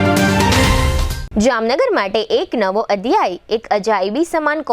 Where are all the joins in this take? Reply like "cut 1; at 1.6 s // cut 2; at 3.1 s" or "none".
cut 1; at 1.1 s

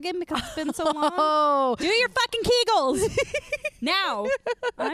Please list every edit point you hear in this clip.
none

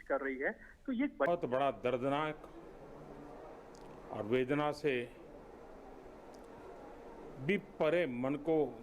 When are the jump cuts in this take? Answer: cut 1; at 1.3 s

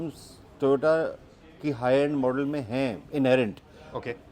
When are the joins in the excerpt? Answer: none

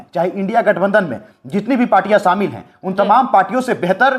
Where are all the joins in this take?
none

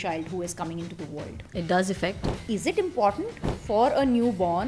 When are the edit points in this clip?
cut 1; at 1.4 s // cut 2; at 2.3 s

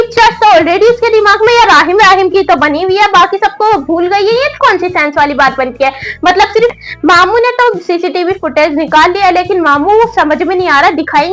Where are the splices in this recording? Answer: cut 1; at 6.7 s

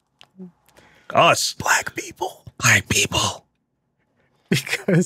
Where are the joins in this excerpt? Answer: none

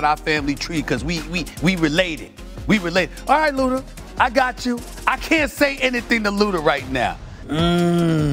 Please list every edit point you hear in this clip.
cut 1; at 7.3 s

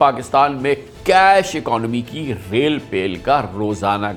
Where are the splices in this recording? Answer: none

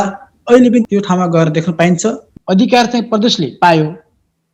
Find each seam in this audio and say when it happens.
cut 1; at 2.3 s

